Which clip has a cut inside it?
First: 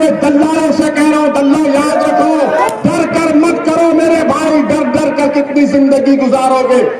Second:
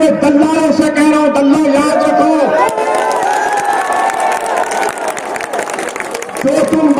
first; 1 cut; at 2.7 s

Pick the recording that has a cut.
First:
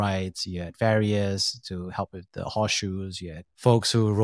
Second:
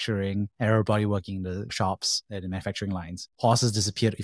second; 1 cut; at 3.2 s

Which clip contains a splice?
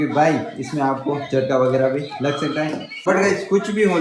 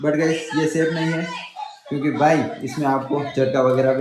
first; 1 cut; at 2.9 s

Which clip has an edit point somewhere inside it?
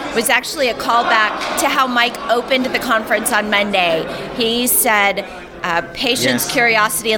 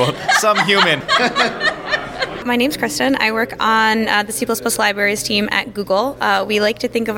second; 2 cuts; at 1.0 s, 2.5 s

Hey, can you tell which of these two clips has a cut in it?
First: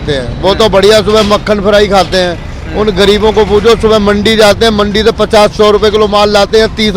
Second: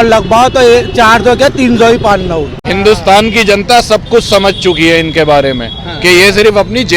second; 1 cut; at 2.6 s

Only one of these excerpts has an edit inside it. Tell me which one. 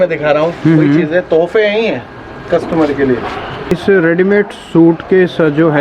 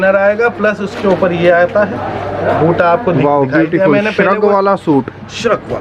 first; 1 cut; at 3.7 s

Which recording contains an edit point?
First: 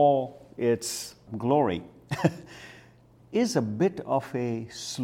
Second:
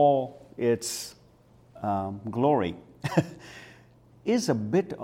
first; 1 cut; at 1.3 s

